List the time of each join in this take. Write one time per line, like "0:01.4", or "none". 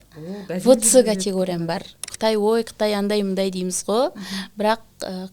0:02.1